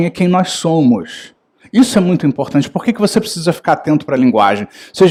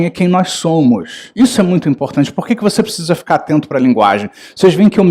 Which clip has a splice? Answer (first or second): second